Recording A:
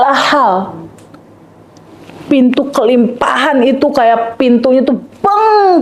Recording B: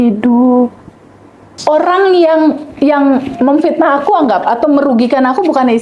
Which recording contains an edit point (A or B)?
B